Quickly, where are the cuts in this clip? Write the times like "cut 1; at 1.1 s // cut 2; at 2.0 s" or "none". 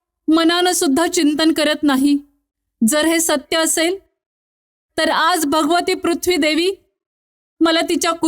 none

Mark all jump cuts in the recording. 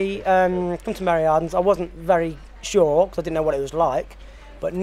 none

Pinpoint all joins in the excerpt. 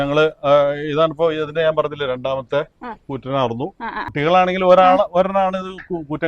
cut 1; at 4.1 s

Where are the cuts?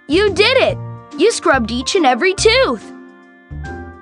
cut 1; at 2.8 s

